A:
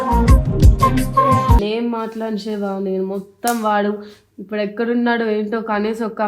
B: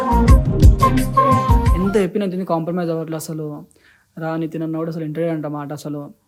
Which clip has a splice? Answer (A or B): A